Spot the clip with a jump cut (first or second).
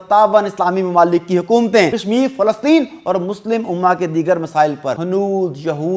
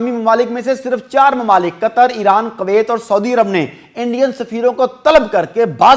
first